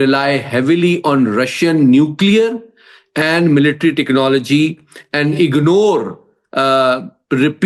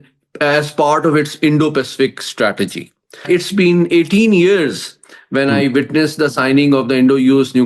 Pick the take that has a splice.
second; 1 cut; at 3.2 s

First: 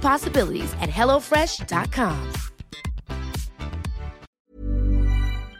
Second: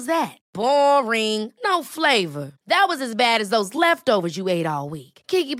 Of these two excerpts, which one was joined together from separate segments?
first; 1 cut; at 4.3 s

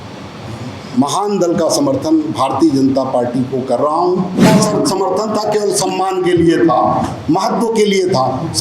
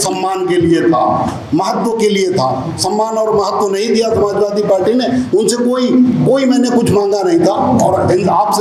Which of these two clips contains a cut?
first; 1 cut; at 4.5 s

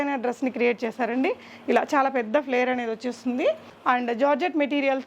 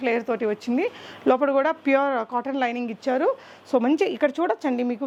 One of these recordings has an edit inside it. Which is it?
first; 1 cut; at 3.7 s

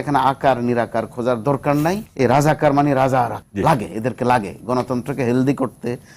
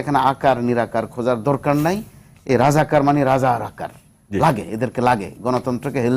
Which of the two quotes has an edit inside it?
first; 2 cuts; at 2.1 s, 3.4 s

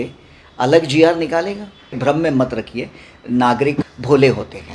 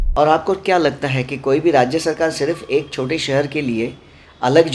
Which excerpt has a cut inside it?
first; 2 cuts; at 1.9 s, 3.9 s

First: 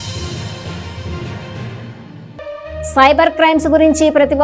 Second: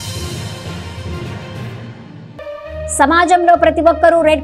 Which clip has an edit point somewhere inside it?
first; 1 cut; at 2.6 s

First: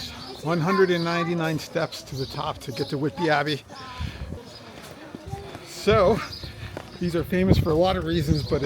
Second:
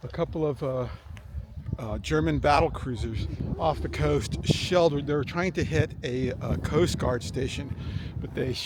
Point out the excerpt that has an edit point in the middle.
first; 1 cut; at 4.3 s

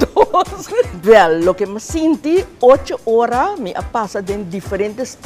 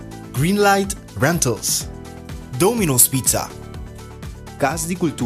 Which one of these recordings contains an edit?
first; 1 cut; at 1.0 s

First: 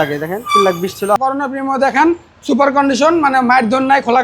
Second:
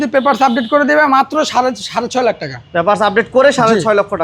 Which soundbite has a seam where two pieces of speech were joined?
first; 1 cut; at 1.2 s

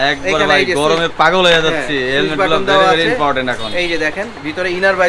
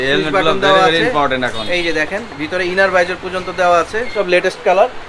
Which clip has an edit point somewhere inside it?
second; 1 cut; at 4.1 s

